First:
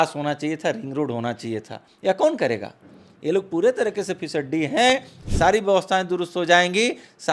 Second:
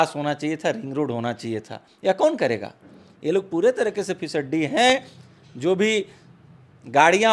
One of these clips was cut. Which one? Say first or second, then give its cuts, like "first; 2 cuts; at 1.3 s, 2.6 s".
first; 1 cut; at 5.2 s